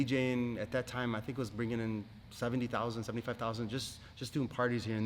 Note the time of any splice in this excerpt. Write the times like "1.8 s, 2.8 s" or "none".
none